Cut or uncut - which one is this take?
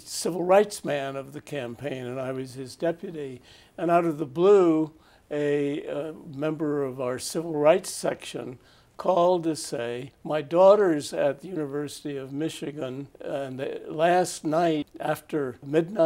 cut